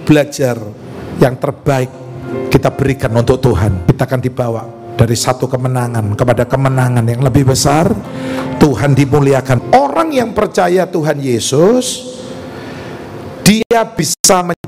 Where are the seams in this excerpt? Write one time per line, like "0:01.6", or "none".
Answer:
0:03.8
0:09.5